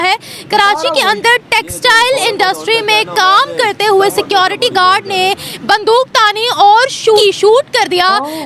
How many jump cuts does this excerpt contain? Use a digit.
1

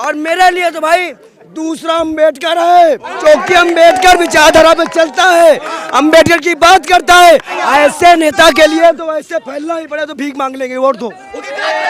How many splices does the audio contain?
2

